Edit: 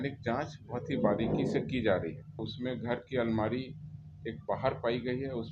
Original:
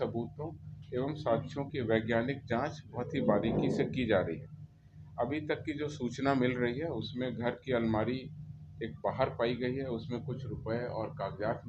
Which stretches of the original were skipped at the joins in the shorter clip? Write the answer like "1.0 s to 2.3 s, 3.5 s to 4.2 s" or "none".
4.7 s to 7.0 s